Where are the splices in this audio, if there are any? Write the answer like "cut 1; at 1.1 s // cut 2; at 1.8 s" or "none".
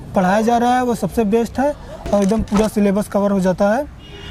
none